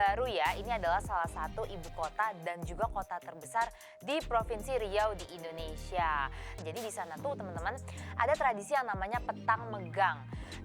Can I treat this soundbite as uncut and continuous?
no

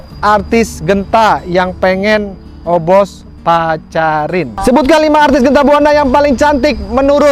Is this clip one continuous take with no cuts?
no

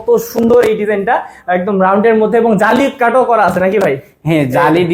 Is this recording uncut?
yes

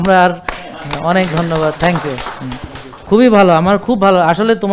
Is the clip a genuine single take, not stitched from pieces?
yes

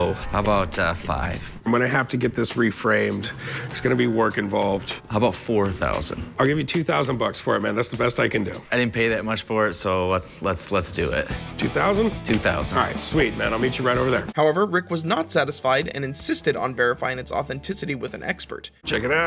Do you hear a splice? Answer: no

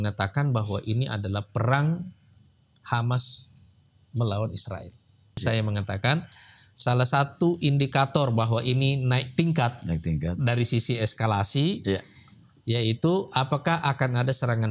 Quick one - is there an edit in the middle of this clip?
yes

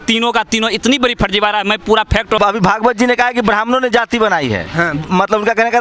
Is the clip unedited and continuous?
no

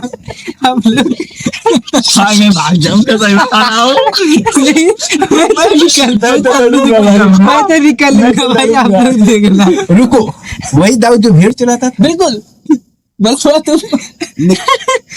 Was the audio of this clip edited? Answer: yes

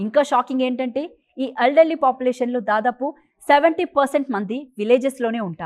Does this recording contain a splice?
no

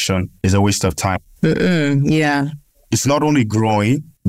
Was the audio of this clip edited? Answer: no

